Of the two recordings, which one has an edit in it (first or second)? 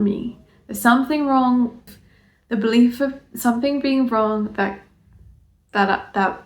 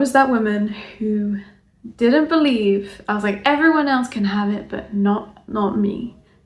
first